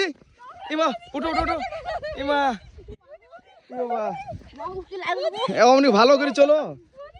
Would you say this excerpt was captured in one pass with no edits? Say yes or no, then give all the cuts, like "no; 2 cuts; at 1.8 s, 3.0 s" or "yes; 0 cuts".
yes; 0 cuts